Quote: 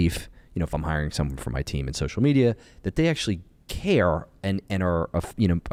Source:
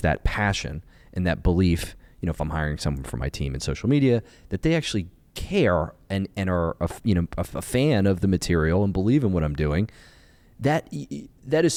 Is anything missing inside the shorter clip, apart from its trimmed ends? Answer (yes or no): no